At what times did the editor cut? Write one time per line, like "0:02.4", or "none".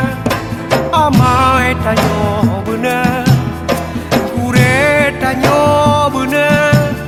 none